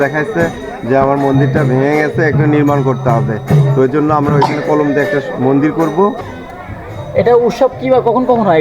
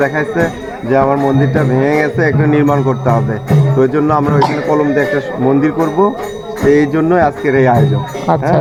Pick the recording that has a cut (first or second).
first